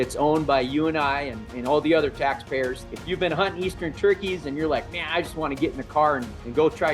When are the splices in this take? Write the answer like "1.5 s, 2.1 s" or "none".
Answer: 2.9 s

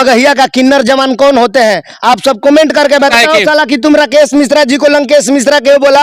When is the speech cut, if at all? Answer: 3.1 s

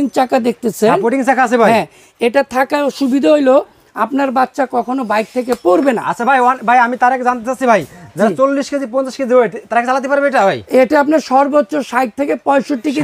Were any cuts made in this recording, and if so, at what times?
none

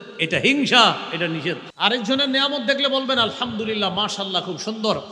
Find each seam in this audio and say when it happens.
1.7 s

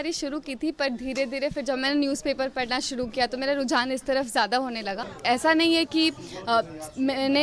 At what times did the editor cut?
5.1 s

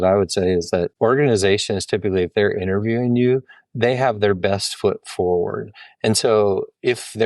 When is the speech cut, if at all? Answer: 0.9 s

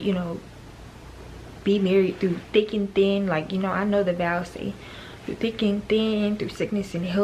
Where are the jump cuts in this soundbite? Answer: none

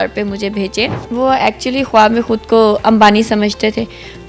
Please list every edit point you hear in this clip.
1.0 s

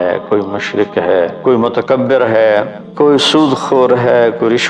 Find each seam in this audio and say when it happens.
1.3 s, 2.8 s

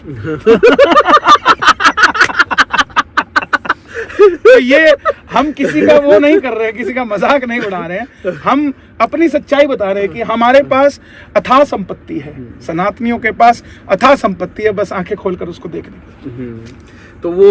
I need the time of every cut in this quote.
none

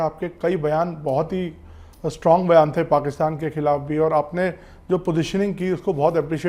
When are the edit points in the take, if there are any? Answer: none

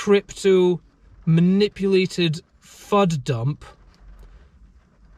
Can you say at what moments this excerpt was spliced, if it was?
none

